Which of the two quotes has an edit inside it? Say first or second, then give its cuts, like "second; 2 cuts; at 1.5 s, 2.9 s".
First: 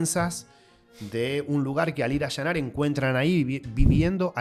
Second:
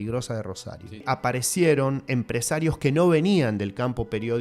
second; 1 cut; at 1.0 s